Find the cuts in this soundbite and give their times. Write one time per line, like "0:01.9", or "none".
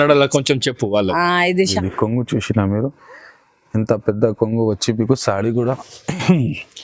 0:01.6

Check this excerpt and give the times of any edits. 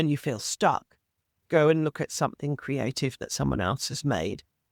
none

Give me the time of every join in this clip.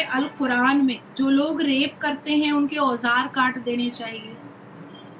0:01.1

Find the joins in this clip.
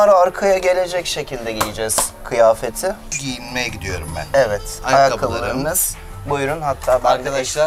none

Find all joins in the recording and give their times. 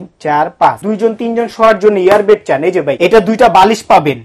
0:00.8
0:02.9

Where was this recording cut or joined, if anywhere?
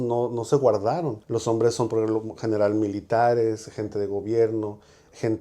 0:01.2

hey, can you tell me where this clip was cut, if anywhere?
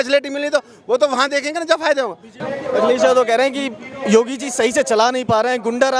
0:02.4

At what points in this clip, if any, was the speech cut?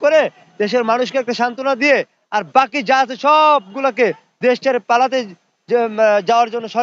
none

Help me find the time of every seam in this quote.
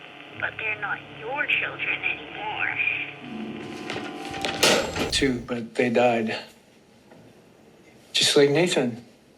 0:05.1

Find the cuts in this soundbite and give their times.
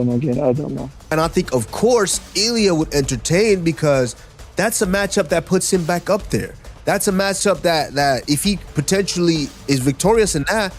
0:00.9

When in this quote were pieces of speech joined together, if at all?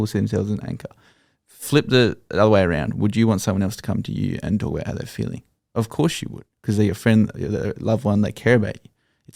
none

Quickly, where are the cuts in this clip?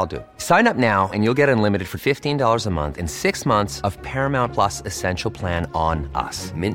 none

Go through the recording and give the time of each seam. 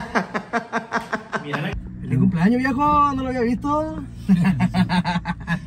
0:01.7

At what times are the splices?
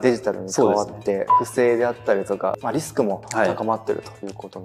0:01.3
0:02.6

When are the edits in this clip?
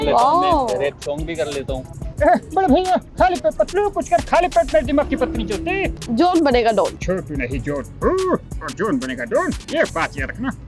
0:02.1
0:06.0
0:07.0

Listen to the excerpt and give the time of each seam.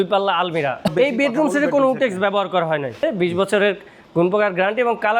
0:00.9
0:03.0

